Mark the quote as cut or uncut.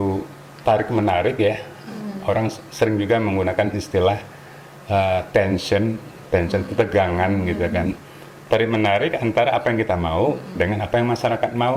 uncut